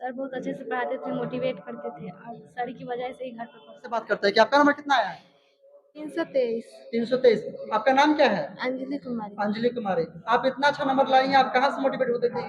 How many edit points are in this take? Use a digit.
2